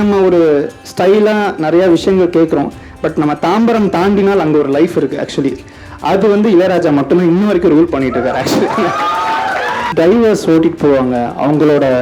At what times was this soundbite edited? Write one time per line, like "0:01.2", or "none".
0:09.9